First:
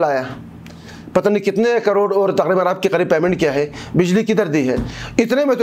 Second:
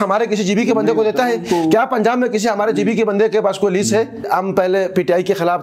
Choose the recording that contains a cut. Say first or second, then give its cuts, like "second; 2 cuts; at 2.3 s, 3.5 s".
second; 1 cut; at 4.3 s